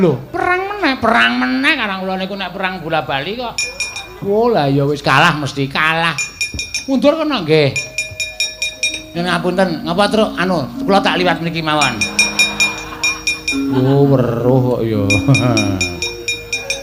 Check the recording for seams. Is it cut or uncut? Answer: uncut